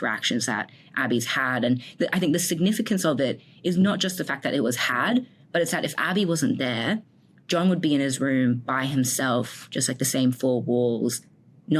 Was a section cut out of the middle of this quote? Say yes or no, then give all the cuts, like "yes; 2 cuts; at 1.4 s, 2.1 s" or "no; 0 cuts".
no; 0 cuts